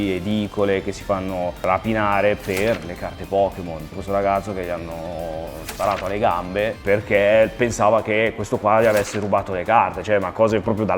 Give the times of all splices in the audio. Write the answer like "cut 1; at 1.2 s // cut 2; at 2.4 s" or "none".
cut 1; at 1.6 s // cut 2; at 3.9 s // cut 3; at 6.8 s